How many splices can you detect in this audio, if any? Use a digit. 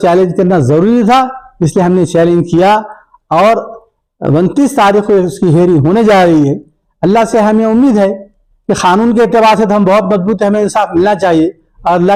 0